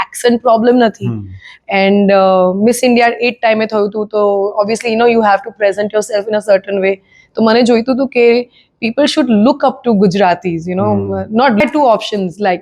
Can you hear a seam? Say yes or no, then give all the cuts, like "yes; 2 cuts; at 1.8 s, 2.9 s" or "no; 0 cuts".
yes; 1 cut; at 11.6 s